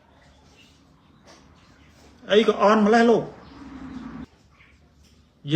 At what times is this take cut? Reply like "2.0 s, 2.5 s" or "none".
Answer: 4.2 s